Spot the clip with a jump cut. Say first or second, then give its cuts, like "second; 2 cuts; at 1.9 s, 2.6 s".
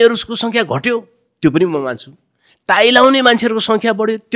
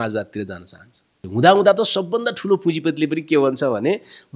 second; 1 cut; at 1.2 s